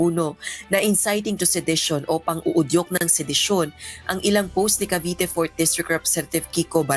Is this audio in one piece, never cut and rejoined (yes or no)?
yes